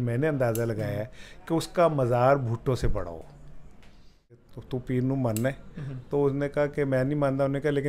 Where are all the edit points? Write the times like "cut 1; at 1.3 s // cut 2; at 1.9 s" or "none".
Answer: cut 1; at 4.4 s

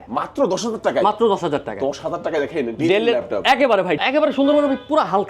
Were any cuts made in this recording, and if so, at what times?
cut 1; at 4.0 s

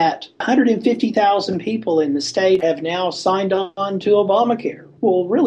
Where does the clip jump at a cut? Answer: cut 1; at 2.6 s

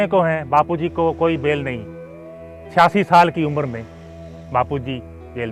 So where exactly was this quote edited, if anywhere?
none

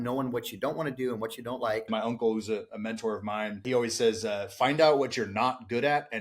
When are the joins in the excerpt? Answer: cut 1; at 1.9 s // cut 2; at 3.6 s

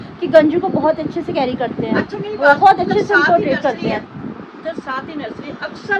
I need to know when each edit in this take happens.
none

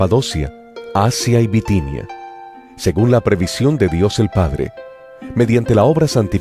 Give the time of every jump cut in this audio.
cut 1; at 2.8 s

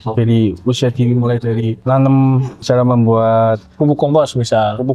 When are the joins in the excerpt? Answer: cut 1; at 1.8 s // cut 2; at 2.6 s

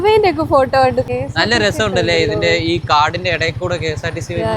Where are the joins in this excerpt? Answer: cut 1; at 1.1 s

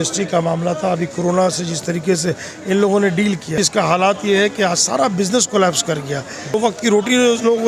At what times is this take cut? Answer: cut 1; at 3.5 s // cut 2; at 6.5 s

